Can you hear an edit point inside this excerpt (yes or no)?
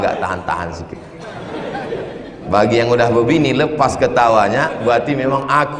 no